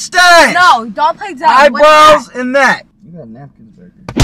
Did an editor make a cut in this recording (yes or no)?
yes